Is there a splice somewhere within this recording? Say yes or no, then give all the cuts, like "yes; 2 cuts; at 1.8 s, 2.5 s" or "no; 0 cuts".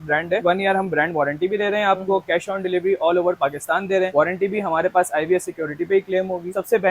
no; 0 cuts